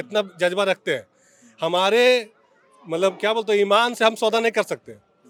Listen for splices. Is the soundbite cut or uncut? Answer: uncut